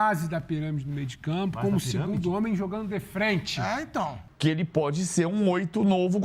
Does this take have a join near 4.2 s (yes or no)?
yes